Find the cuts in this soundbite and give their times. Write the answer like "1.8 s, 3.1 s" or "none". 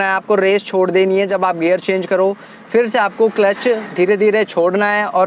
none

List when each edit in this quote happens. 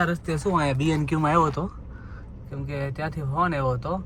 none

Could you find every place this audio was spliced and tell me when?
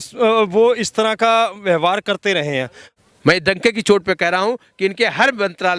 2.8 s

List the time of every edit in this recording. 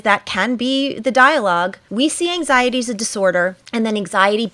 1.8 s, 3.6 s

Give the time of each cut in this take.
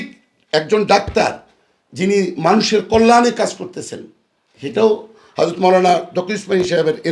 none

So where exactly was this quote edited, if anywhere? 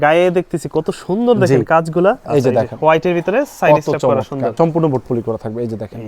2.2 s, 4.5 s

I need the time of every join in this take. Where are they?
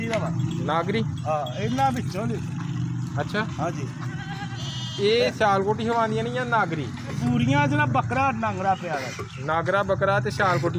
7.2 s

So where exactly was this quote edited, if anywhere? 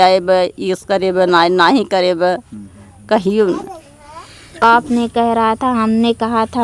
4.6 s

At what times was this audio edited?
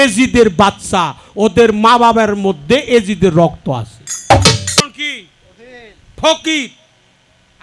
4.8 s

